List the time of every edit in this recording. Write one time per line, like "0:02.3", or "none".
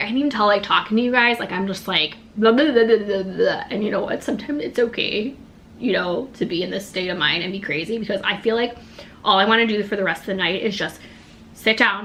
none